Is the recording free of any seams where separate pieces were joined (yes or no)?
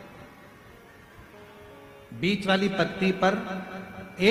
yes